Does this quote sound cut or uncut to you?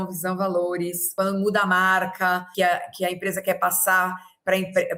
cut